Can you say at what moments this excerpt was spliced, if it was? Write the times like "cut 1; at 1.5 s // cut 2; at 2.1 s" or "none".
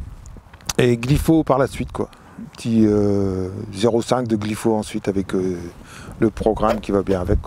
none

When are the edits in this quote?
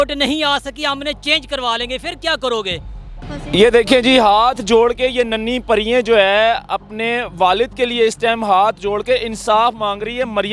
cut 1; at 3.3 s

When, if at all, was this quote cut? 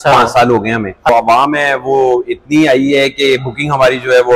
cut 1; at 1.1 s

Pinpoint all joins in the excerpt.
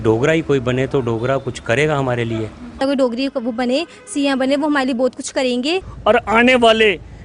cut 1; at 2.8 s // cut 2; at 5.9 s

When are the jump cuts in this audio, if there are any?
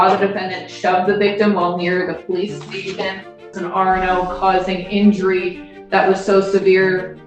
cut 1; at 3.6 s

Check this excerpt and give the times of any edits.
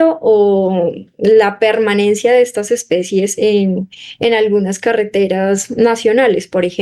none

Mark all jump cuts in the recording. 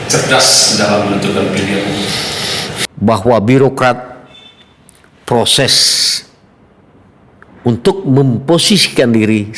cut 1; at 2.8 s

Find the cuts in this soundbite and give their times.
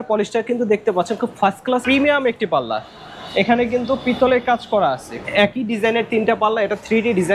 cut 1; at 1.8 s // cut 2; at 5.1 s

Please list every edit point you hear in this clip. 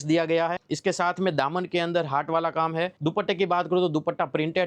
none

